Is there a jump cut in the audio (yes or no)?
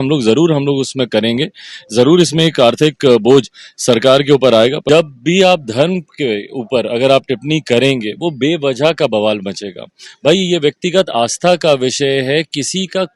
yes